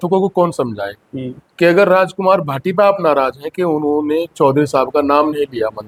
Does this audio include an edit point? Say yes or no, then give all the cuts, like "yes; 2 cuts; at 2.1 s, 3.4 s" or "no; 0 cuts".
no; 0 cuts